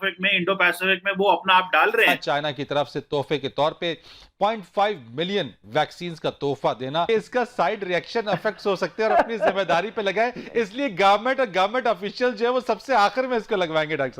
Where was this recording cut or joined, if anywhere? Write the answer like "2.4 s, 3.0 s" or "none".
2.2 s, 7.1 s